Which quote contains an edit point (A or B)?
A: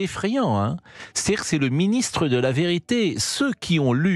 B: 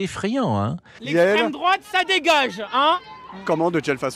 B